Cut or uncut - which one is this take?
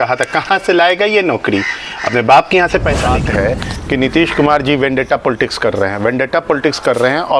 cut